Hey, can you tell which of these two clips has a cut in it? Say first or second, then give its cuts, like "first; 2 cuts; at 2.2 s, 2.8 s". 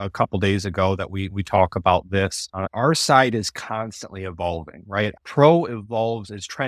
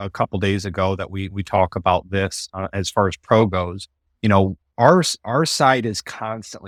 first; 2 cuts; at 2.7 s, 5.1 s